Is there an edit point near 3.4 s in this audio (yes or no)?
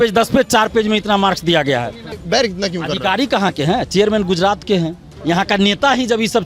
no